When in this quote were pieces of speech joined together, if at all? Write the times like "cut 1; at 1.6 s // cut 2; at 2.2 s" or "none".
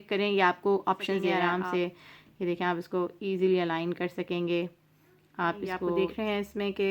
cut 1; at 1.4 s // cut 2; at 6.0 s

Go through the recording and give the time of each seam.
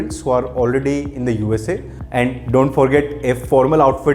cut 1; at 1.9 s

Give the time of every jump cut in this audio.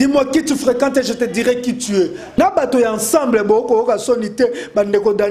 cut 1; at 2.4 s

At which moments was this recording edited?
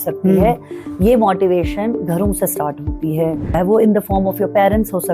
cut 1; at 3.6 s

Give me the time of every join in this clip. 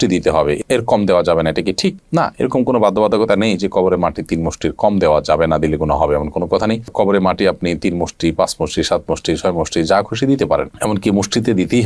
none

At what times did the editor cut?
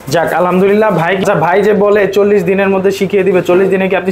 cut 1; at 1.2 s

